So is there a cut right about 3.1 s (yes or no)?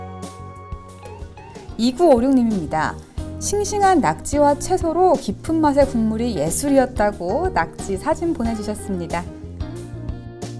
no